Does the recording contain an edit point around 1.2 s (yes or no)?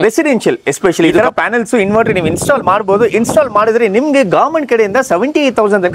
yes